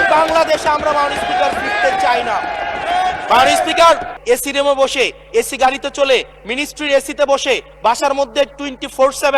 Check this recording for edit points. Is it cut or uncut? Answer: cut